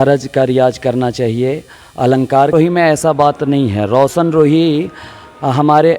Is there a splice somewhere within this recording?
yes; 1 cut; at 2.5 s

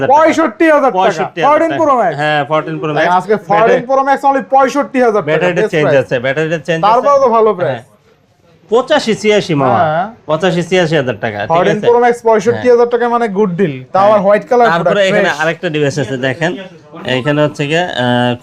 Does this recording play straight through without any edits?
yes; 0 cuts

